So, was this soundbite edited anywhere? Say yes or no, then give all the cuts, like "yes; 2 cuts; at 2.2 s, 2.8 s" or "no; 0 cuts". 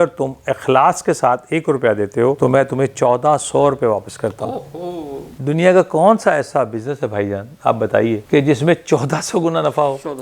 yes; 1 cut; at 5.3 s